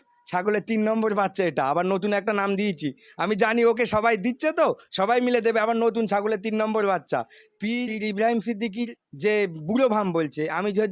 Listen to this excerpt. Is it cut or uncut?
cut